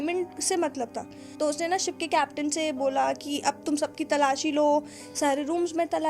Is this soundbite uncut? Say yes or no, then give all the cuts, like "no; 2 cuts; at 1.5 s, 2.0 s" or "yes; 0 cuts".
yes; 0 cuts